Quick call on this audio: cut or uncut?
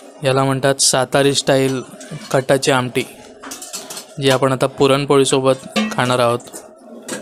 uncut